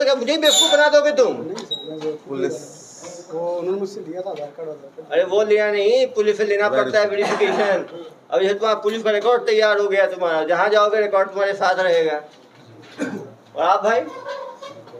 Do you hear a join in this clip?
no; 0 cuts

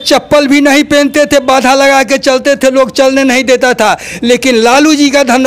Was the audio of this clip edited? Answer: no; 0 cuts

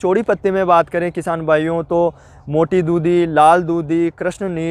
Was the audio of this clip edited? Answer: no; 0 cuts

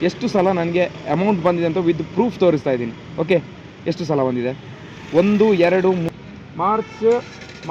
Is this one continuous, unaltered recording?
no; 1 cut; at 6.1 s

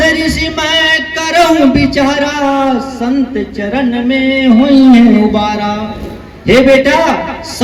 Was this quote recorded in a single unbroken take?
yes; 0 cuts

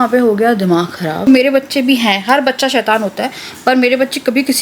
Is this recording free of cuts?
no; 1 cut; at 1.3 s

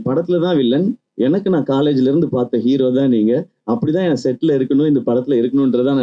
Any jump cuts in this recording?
no; 0 cuts

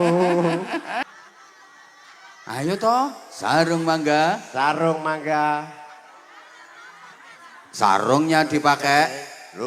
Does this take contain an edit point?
yes; 1 cut; at 1.0 s

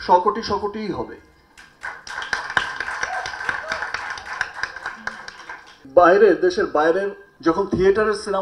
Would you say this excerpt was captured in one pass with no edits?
no; 2 cuts; at 5.8 s, 7.2 s

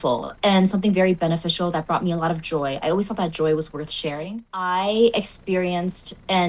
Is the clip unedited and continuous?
no; 1 cut; at 4.5 s

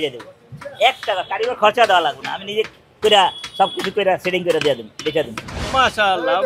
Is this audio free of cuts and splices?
no; 1 cut; at 5.5 s

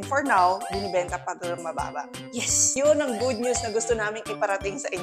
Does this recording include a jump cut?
yes; 1 cut; at 2.7 s

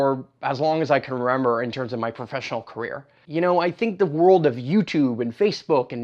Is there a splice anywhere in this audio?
yes; 1 cut; at 3.1 s

